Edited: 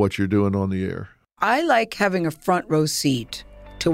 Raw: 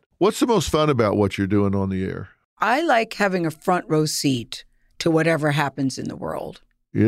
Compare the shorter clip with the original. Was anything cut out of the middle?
no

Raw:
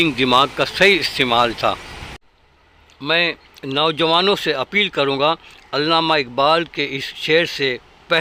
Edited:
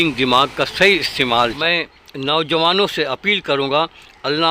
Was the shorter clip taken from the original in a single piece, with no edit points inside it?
no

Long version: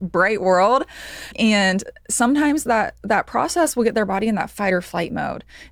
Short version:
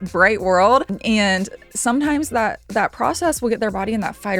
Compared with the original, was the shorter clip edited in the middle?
yes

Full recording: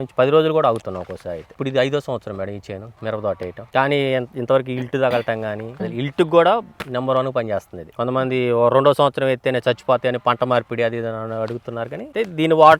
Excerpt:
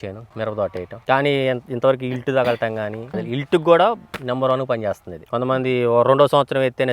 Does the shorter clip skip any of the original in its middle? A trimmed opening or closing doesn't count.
no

